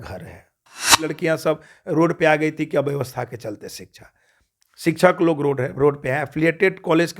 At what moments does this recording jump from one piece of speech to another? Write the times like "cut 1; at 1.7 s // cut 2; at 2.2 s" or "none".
cut 1; at 1.1 s